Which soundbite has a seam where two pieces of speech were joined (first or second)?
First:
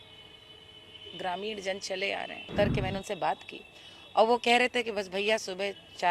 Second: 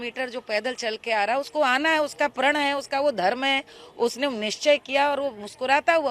first